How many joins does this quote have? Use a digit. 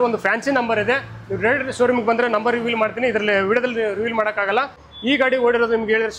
1